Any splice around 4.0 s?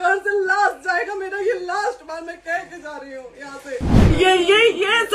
yes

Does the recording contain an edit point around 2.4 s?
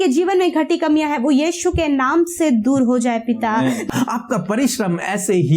no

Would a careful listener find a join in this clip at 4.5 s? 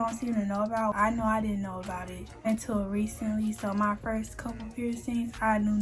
no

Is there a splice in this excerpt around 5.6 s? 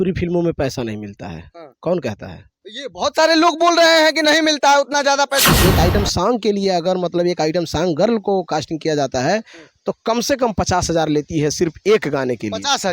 yes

